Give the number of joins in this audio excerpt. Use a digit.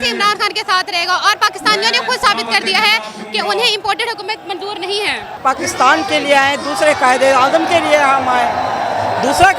1